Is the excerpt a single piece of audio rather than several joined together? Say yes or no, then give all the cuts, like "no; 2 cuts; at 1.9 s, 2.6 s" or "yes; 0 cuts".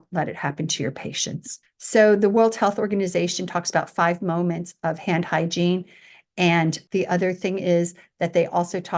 no; 1 cut; at 6.8 s